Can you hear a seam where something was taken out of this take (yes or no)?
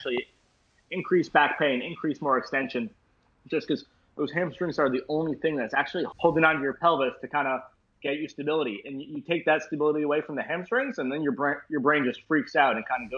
yes